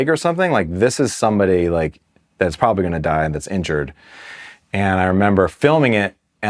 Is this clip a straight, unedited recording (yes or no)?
yes